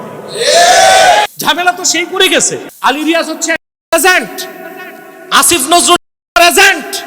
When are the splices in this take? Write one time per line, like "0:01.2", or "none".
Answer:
0:01.4
0:02.7